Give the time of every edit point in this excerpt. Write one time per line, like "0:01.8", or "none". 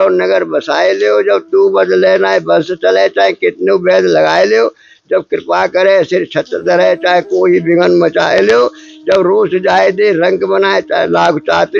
none